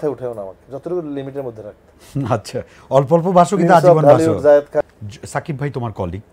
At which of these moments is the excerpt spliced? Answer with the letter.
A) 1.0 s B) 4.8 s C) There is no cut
B